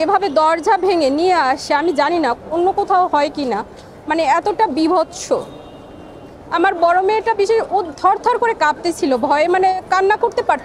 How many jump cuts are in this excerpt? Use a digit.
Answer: 0